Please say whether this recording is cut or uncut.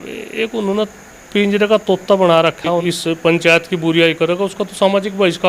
cut